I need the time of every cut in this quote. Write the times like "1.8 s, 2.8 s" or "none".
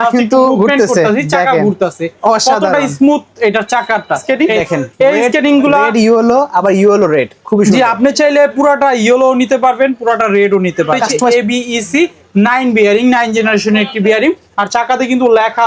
4.2 s, 11.3 s